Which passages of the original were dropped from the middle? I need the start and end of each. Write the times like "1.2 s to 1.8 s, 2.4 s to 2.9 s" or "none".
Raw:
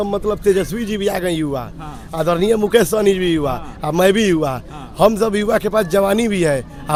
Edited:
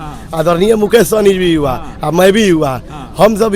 none